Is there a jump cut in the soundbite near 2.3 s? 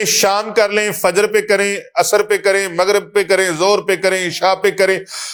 no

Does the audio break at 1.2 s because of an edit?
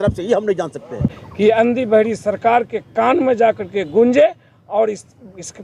yes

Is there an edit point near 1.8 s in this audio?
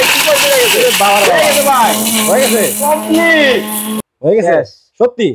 no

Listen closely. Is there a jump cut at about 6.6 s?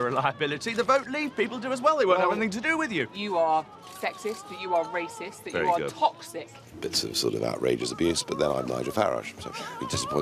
yes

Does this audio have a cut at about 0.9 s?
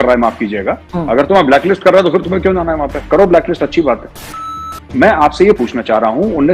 no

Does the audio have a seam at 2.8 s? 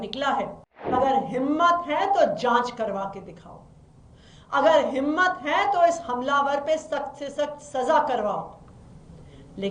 no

